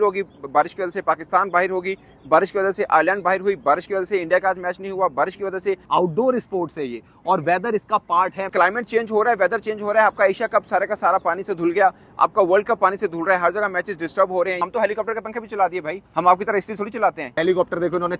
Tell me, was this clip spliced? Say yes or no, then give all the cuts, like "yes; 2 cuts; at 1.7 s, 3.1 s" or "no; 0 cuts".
yes; 5 cuts; at 5.8 s, 8.5 s, 14.6 s, 16.0 s, 17.4 s